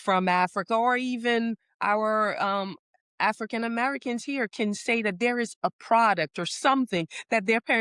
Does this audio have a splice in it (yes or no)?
no